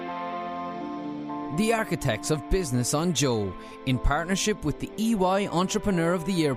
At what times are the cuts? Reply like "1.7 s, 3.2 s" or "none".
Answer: none